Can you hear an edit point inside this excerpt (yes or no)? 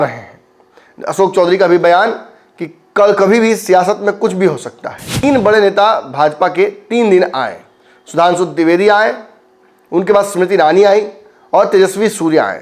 yes